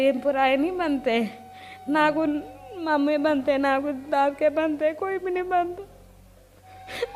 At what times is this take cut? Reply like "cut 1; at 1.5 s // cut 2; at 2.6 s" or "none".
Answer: none